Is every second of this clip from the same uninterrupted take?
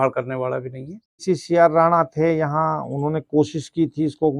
no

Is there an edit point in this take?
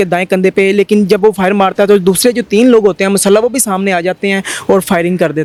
no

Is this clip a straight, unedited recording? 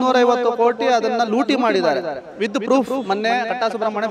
yes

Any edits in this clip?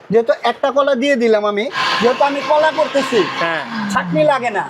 yes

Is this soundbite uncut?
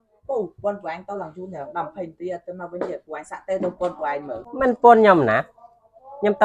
no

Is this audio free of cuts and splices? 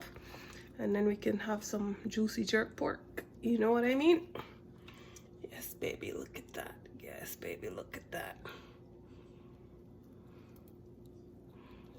yes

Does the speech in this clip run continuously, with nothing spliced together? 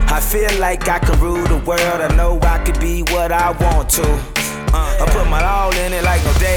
yes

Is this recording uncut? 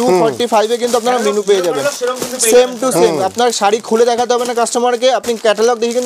yes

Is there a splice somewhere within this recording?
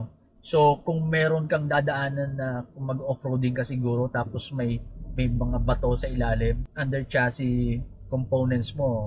yes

